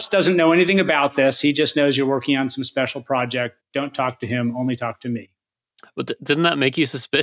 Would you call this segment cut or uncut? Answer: uncut